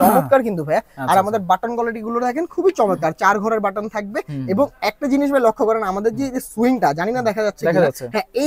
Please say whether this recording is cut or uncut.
uncut